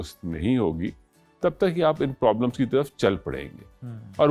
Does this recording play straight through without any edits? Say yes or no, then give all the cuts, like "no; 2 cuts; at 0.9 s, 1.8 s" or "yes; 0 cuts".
yes; 0 cuts